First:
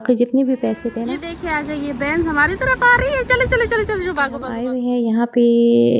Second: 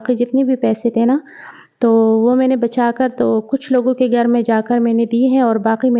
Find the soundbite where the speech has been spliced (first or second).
first